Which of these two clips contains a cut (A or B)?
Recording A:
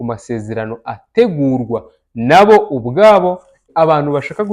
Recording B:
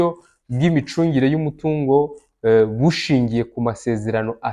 A